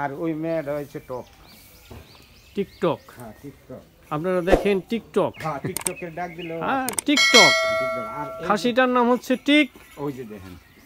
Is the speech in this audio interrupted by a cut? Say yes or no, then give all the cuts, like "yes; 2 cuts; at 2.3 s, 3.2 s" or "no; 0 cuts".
no; 0 cuts